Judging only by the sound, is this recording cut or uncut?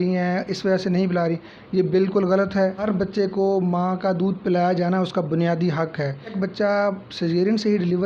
cut